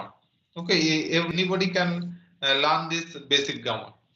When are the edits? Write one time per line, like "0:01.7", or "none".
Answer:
0:01.3